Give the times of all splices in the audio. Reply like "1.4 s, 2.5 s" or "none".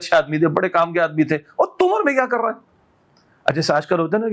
none